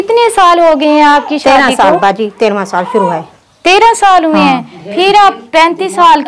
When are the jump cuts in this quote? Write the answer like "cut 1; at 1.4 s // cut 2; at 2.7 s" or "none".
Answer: none